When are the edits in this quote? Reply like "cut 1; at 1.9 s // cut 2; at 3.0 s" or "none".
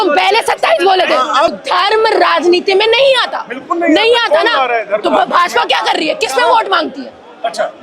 cut 1; at 1.5 s